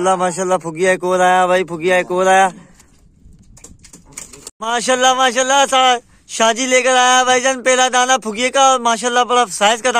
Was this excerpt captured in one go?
yes; 0 cuts

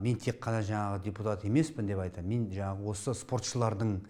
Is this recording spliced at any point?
no; 0 cuts

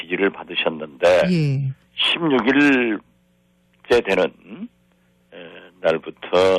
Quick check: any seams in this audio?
yes; 1 cut; at 4.7 s

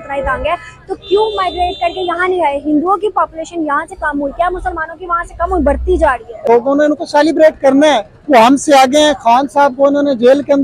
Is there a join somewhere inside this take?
yes; 1 cut; at 6.4 s

